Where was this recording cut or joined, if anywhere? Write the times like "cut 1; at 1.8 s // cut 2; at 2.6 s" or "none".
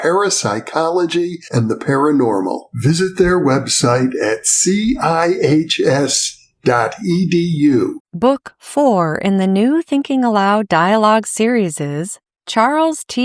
cut 1; at 8.0 s